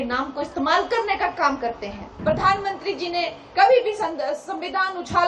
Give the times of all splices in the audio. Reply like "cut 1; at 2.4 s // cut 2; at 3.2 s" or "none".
cut 1; at 2.1 s